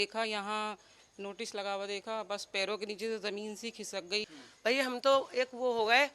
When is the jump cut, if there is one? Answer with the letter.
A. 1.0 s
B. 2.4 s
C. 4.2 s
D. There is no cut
C